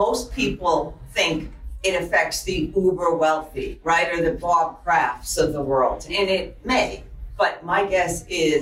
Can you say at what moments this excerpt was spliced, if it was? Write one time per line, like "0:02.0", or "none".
0:01.0
0:04.4